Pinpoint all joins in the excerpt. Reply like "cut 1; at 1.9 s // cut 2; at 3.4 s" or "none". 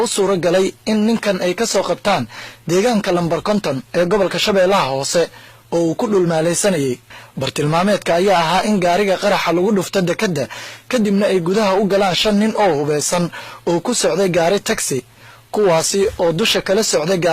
cut 1; at 5.1 s